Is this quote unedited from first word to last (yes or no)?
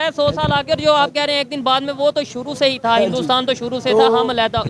yes